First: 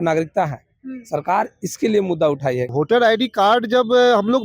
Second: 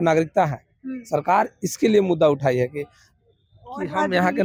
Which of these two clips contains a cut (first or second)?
first